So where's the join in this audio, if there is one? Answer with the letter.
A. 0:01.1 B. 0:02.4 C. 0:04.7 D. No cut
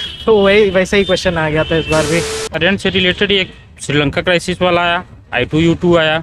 B